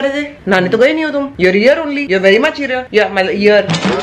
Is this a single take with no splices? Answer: yes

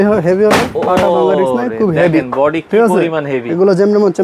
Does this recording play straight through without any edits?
yes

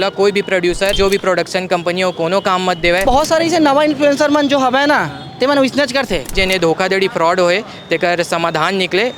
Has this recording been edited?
yes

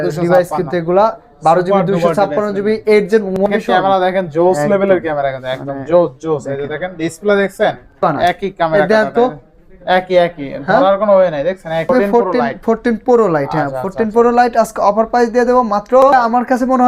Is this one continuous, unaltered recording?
no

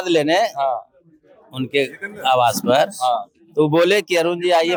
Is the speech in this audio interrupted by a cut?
no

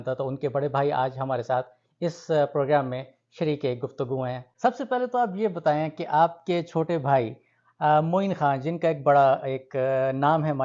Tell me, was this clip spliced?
yes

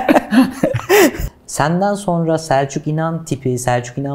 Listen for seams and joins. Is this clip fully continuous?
no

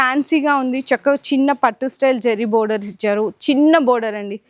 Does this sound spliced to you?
no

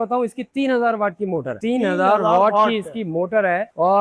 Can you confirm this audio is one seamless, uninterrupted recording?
yes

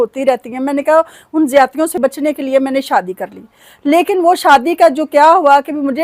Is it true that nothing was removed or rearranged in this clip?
yes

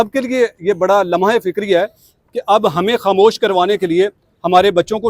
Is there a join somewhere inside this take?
no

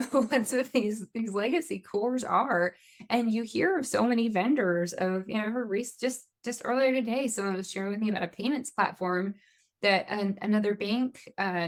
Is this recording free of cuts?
yes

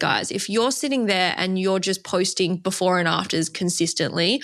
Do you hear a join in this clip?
no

